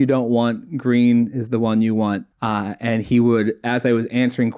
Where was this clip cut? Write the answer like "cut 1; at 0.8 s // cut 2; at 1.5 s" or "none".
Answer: none

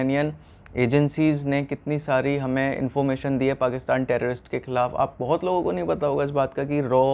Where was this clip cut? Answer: none

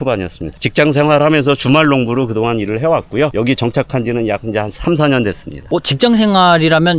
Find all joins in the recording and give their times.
cut 1; at 5.7 s

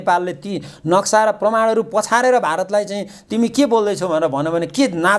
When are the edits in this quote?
none

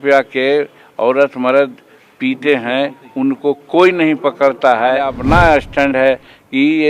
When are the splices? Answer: cut 1; at 5.2 s

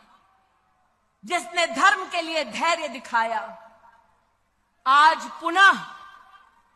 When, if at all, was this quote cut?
none

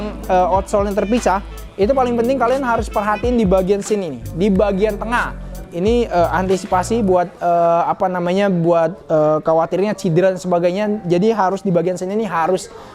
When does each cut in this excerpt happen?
none

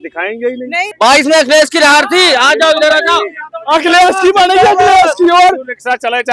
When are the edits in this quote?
cut 1; at 0.9 s

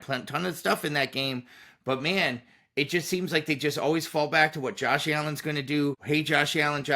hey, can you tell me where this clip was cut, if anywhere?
cut 1; at 6.0 s

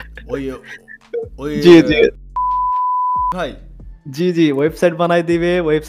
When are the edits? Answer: none

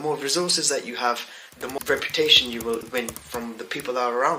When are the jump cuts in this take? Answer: cut 1; at 1.8 s // cut 2; at 2.9 s

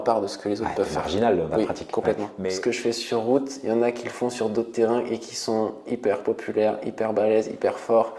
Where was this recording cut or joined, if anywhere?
cut 1; at 2.3 s

